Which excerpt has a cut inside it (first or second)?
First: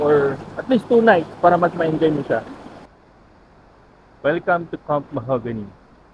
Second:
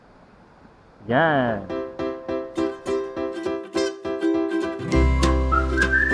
second